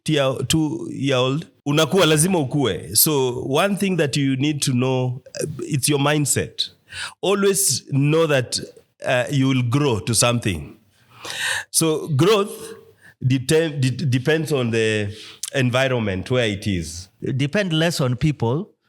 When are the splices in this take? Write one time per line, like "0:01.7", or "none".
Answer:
0:01.5
0:17.2